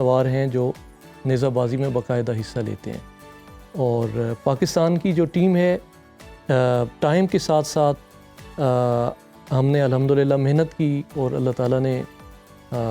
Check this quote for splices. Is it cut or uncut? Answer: uncut